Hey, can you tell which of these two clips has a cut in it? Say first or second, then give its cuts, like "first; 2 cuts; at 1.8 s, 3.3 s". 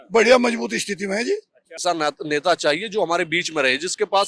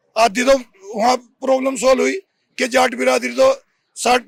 first; 1 cut; at 1.8 s